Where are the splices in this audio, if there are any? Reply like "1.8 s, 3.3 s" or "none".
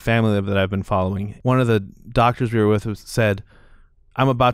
1.3 s